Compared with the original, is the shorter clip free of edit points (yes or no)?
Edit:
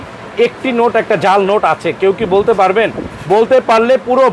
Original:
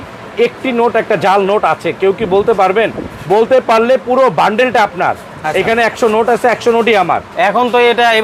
yes